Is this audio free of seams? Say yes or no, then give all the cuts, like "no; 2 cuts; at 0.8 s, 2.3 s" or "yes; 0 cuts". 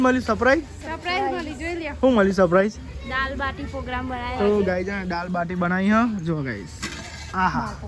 yes; 0 cuts